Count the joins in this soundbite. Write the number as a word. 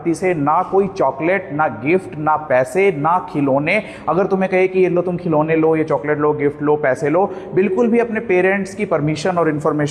zero